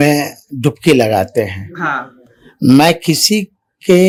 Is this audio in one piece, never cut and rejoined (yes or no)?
yes